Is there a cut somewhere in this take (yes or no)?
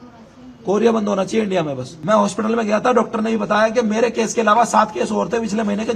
yes